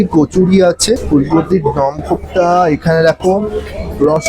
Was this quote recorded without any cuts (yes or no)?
no